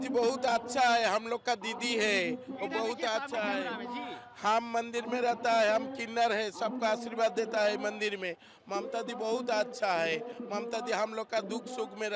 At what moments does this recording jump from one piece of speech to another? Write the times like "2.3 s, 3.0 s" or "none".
none